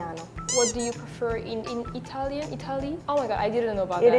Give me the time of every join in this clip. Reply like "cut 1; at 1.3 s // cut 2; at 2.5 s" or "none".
cut 1; at 3.0 s